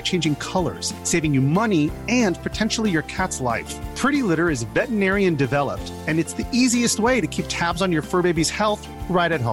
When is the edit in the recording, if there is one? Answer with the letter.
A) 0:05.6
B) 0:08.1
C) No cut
C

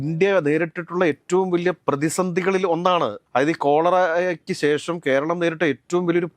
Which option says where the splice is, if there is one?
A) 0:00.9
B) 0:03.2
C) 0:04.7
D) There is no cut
B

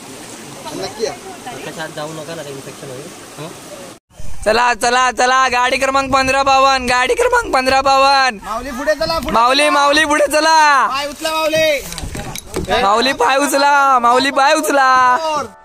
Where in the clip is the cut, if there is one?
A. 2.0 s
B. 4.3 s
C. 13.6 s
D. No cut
B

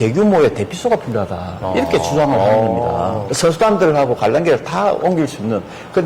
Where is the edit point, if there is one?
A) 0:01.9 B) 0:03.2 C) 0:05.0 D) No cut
B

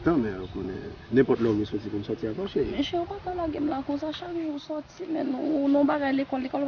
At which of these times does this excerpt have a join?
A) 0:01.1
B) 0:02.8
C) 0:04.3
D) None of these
B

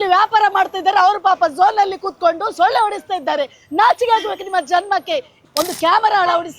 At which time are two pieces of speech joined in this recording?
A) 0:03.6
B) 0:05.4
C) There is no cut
B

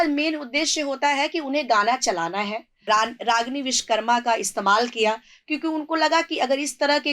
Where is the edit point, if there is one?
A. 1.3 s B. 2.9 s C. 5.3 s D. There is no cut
B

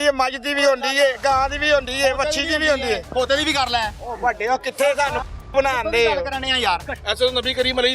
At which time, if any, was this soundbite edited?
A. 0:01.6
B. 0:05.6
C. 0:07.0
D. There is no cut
C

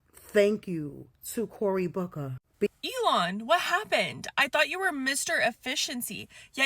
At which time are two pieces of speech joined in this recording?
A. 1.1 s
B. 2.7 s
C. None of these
B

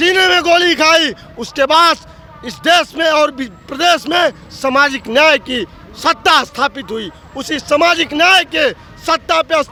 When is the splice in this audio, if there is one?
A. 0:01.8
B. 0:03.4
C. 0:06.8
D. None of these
D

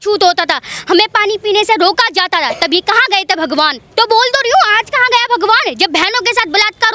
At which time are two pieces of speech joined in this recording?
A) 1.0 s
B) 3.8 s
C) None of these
B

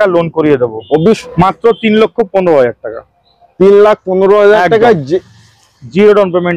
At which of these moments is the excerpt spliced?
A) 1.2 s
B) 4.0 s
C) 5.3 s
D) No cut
A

